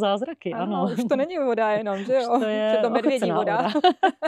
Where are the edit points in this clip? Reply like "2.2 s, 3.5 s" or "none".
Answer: none